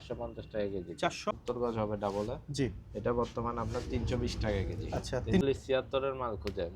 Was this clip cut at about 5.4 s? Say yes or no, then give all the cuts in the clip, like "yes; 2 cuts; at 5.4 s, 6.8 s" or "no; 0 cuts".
yes; 2 cuts; at 1.3 s, 5.4 s